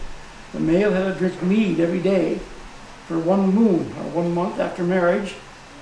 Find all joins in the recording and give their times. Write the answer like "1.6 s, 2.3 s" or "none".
none